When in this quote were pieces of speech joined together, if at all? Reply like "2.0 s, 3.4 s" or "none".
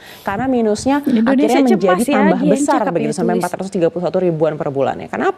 none